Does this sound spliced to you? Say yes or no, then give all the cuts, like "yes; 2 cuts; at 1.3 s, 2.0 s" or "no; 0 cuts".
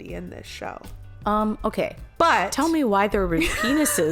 no; 0 cuts